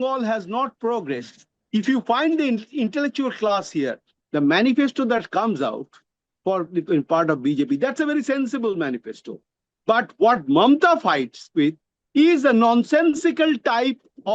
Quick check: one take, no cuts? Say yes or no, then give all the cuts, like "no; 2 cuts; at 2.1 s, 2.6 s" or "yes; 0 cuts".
no; 1 cut; at 4.1 s